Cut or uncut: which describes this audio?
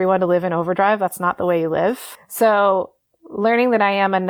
cut